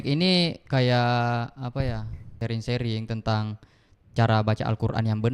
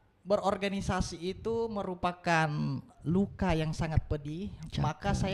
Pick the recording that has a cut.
first; 1 cut; at 2.4 s

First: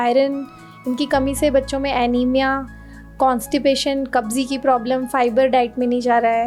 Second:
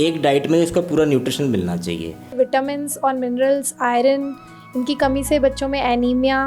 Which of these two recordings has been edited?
second; 1 cut; at 2.3 s

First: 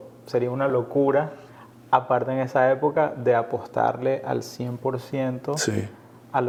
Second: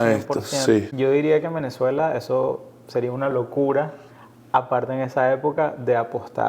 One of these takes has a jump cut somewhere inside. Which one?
second; 1 cut; at 0.9 s

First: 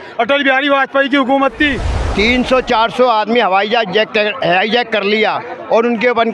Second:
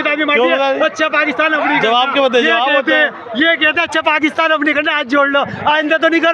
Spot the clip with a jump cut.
first; 1 cut; at 2.0 s

